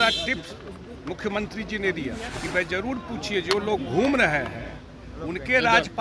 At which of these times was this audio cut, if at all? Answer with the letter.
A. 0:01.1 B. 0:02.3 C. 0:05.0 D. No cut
B